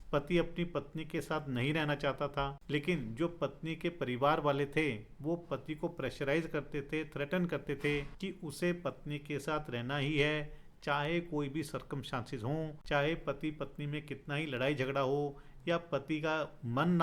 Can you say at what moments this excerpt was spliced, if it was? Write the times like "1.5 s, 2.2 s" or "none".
2.6 s, 8.1 s, 12.8 s